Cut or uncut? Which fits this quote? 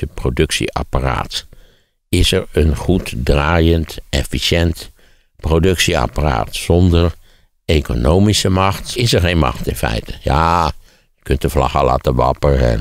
cut